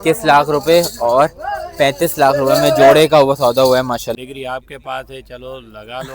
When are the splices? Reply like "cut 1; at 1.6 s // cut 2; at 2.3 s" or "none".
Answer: cut 1; at 4.1 s